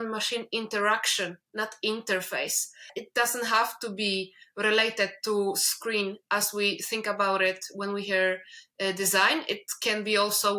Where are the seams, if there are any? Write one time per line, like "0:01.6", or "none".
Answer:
0:03.0